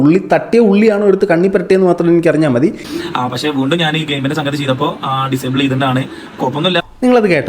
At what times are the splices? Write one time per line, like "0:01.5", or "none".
0:02.9

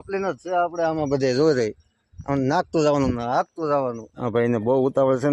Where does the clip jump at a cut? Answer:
0:04.1

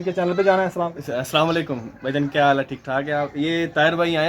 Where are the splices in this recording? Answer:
0:00.9

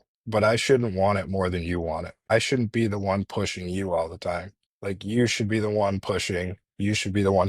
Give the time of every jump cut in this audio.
0:02.3

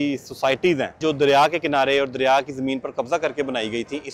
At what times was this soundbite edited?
0:01.0

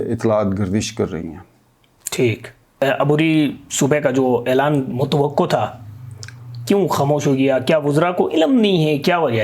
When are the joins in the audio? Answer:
0:02.7

